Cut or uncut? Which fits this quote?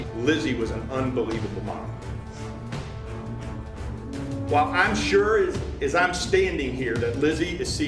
uncut